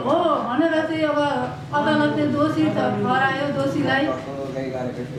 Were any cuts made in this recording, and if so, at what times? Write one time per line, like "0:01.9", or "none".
none